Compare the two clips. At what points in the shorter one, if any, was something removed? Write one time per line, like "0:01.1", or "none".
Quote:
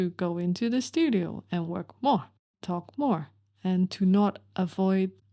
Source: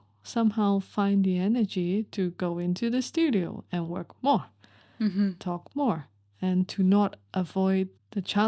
0:02.6